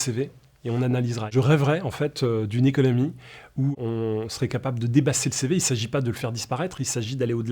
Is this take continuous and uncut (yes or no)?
no